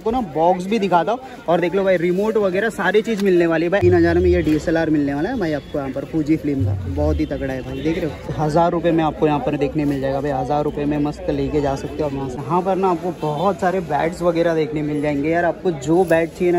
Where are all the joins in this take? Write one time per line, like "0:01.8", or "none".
0:03.8
0:08.4
0:12.4